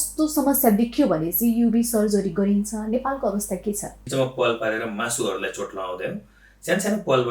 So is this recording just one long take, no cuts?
no; 1 cut; at 4.0 s

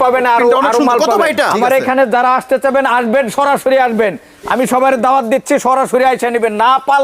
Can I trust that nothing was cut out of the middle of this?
no; 1 cut; at 1.5 s

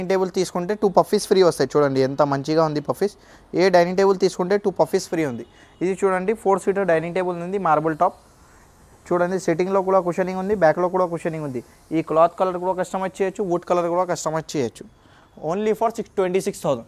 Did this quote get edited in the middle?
no; 0 cuts

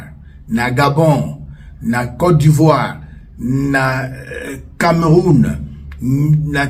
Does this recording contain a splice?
no; 0 cuts

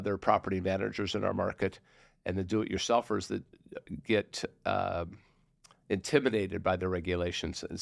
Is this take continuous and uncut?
yes; 0 cuts

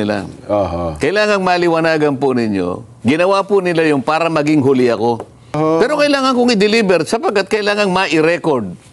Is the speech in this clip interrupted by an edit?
yes; 1 cut; at 5.6 s

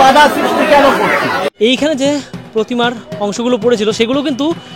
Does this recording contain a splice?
yes; 1 cut; at 1.5 s

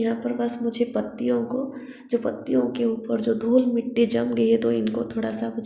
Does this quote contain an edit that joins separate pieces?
no; 0 cuts

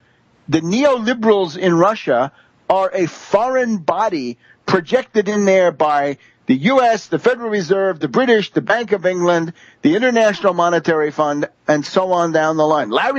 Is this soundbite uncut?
yes; 0 cuts

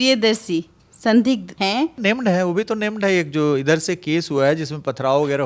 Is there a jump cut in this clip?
yes; 1 cut; at 2.0 s

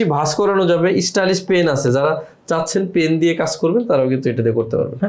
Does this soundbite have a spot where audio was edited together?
no; 0 cuts

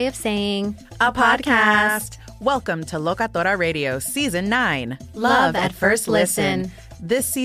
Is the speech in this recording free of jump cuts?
yes; 0 cuts

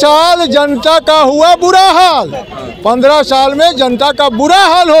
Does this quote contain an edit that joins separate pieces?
no; 0 cuts

